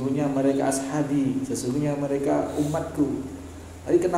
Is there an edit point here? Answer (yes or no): no